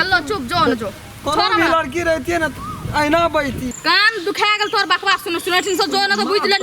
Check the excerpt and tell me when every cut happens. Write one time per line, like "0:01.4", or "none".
0:03.7